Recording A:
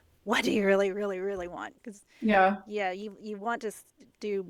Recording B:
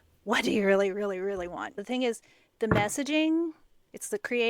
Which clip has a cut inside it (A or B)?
B